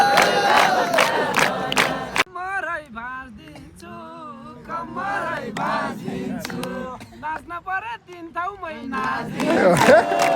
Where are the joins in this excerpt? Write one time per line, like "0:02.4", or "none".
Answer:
0:02.3